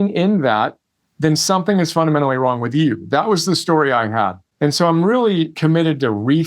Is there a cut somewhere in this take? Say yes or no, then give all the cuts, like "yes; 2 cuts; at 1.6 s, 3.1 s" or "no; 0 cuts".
yes; 2 cuts; at 4.4 s, 5.5 s